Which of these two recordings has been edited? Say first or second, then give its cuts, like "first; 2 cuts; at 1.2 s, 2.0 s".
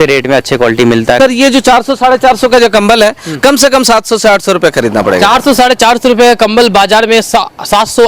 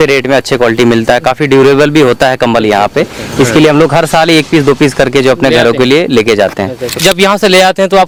first; 1 cut; at 1.2 s